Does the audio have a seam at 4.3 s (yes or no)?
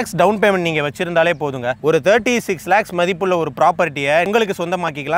yes